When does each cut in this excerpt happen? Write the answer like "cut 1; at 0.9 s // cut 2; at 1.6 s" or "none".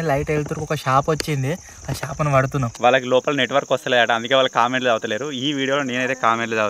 cut 1; at 2.7 s

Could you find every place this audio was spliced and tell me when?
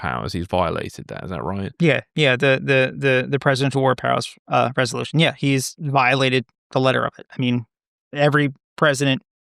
none

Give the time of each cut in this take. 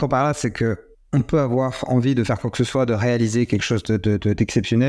cut 1; at 0.9 s

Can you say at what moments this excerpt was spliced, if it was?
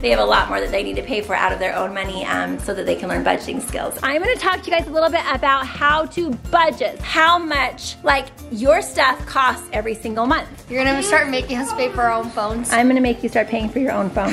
cut 1; at 4.0 s // cut 2; at 7.0 s // cut 3; at 10.6 s

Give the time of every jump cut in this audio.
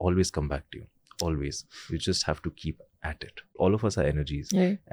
cut 1; at 3.6 s

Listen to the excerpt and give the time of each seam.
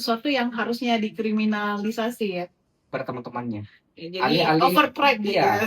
cut 1; at 2.9 s

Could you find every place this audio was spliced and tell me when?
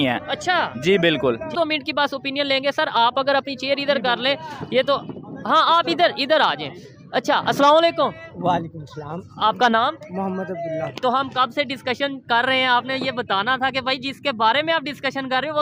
cut 1; at 1.5 s

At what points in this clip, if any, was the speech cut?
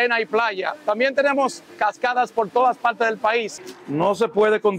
cut 1; at 3.7 s

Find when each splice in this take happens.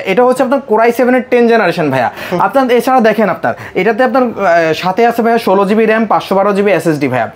none

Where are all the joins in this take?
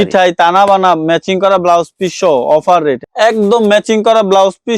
cut 1; at 3.0 s

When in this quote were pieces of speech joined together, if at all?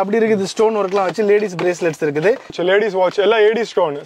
cut 1; at 2.6 s

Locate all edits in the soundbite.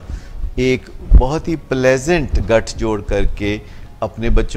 none

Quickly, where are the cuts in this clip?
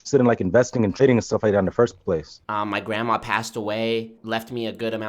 cut 1; at 2.4 s // cut 2; at 4.2 s

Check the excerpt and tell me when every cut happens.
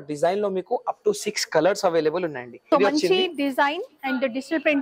cut 1; at 2.5 s

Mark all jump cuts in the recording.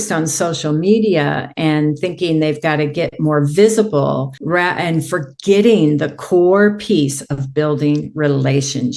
none

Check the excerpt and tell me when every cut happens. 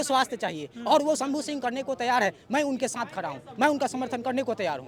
none

